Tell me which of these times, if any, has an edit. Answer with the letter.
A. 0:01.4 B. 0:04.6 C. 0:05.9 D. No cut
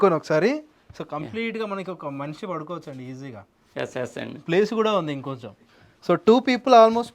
D